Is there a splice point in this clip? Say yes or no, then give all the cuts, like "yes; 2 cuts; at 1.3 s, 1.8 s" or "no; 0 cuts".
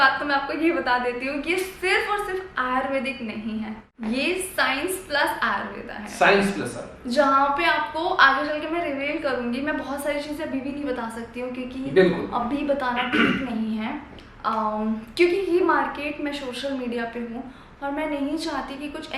no; 0 cuts